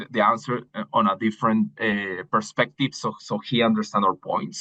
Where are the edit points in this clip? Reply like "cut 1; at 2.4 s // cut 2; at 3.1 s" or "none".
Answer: none